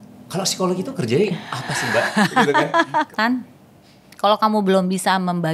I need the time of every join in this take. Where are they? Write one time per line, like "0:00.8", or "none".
0:03.1